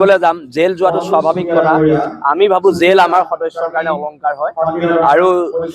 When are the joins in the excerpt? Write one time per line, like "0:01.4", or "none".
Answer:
none